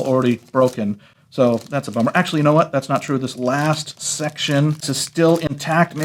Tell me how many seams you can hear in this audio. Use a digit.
1